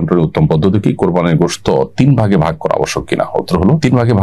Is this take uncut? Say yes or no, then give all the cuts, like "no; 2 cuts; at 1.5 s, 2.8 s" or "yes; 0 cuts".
yes; 0 cuts